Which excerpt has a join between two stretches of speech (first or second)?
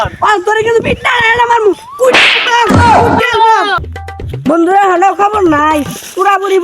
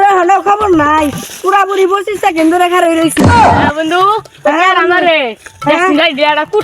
first